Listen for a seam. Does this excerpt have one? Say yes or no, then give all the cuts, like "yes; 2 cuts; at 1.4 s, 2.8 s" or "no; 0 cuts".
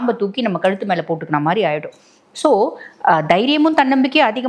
no; 0 cuts